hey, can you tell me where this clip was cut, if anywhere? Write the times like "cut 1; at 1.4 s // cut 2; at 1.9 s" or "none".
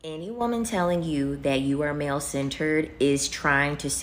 none